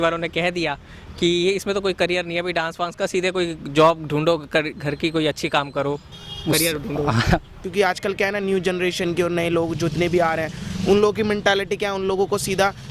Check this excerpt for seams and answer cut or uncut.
cut